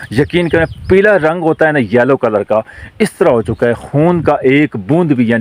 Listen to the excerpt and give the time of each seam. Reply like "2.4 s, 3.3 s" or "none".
none